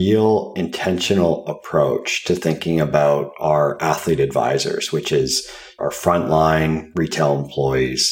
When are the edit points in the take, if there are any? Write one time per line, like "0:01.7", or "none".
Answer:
0:05.8